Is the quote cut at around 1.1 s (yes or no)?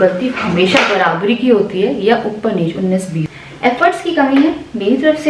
no